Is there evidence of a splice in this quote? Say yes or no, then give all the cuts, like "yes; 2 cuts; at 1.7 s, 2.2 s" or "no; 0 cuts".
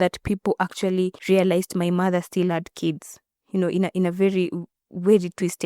yes; 1 cut; at 1.2 s